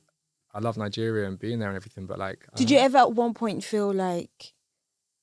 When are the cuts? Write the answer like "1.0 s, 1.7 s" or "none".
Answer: 2.4 s

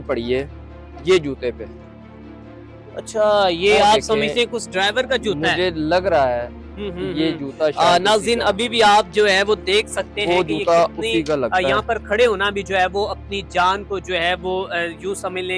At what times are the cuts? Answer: none

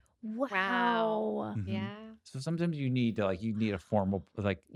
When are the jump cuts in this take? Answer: none

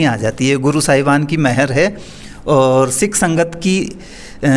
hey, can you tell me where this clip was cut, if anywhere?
none

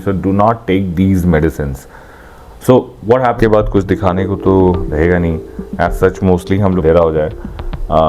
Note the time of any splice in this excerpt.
3.4 s, 6.8 s

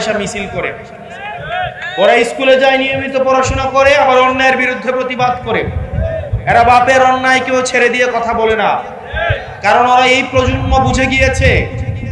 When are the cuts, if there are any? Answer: none

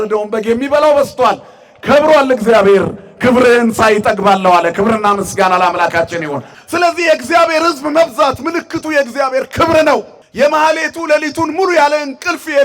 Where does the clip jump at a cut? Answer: 6.5 s, 10.2 s

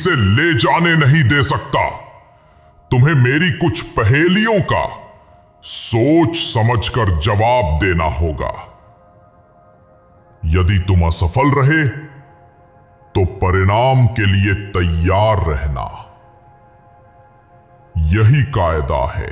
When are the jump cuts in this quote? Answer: none

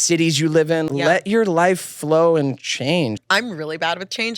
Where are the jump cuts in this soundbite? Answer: 0.9 s, 3.2 s

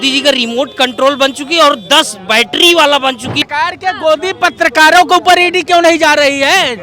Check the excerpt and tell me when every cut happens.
3.4 s

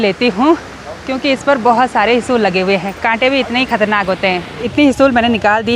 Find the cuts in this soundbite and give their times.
4.6 s

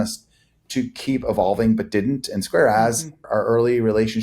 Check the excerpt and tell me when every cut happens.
3.3 s

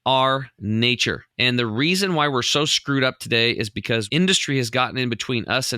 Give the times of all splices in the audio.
1.3 s, 4.1 s

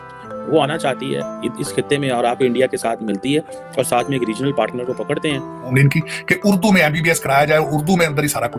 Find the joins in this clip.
5.6 s

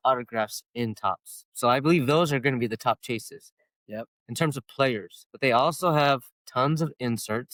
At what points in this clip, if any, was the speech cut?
none

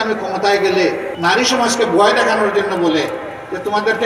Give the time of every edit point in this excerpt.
1.1 s

